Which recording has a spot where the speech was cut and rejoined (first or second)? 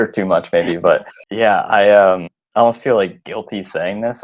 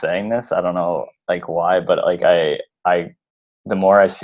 first